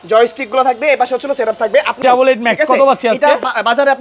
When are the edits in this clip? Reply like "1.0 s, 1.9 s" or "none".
2.0 s